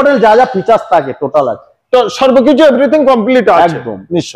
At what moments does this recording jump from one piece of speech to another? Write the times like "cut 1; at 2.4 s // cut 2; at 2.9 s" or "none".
none